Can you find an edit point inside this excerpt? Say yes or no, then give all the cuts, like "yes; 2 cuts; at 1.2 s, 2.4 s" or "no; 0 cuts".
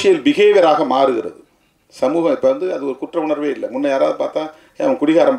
no; 0 cuts